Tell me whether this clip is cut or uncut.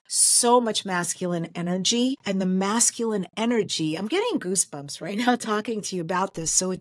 cut